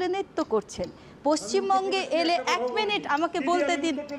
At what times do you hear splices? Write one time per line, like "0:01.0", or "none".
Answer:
none

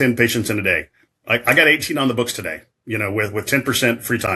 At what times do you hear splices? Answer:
none

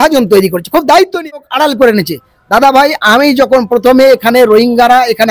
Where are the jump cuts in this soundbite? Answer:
0:01.2

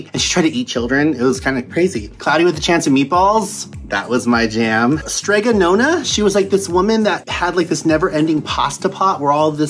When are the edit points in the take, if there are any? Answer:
0:05.0
0:07.3

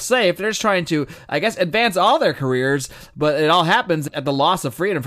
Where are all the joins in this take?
0:04.0

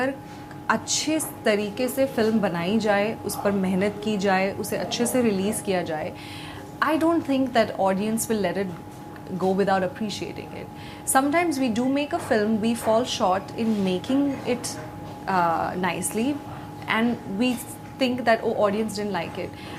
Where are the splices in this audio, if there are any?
none

